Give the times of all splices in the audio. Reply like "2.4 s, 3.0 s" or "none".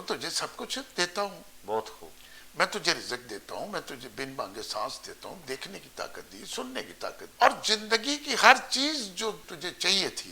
7.2 s, 9.5 s